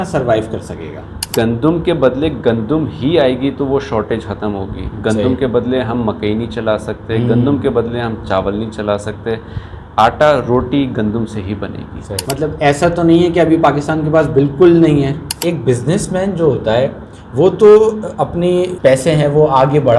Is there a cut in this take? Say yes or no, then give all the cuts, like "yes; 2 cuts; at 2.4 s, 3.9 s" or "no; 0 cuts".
yes; 4 cuts; at 1.2 s, 12.2 s, 15.3 s, 18.7 s